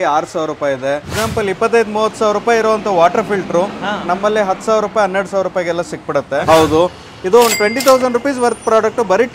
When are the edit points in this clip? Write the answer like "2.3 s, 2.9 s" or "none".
1.1 s, 6.4 s